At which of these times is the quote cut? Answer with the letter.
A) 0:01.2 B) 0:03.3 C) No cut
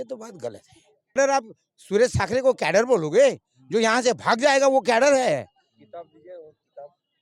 A